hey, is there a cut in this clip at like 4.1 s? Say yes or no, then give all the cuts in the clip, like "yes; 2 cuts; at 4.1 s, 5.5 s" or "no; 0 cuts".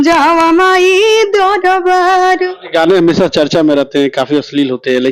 no; 1 cut; at 2.6 s